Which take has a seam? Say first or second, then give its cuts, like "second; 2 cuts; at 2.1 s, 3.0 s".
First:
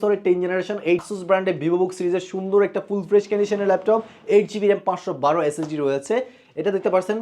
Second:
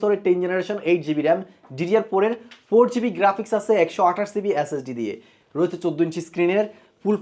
first; 1 cut; at 1.0 s